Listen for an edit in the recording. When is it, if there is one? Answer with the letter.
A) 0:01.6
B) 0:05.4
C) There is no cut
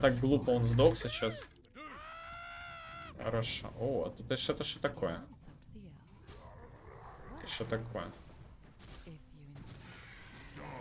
A